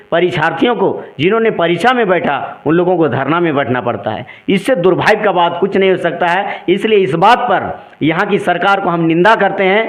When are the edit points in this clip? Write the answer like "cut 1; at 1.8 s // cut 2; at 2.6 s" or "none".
none